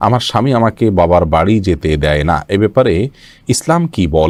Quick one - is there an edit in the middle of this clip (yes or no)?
no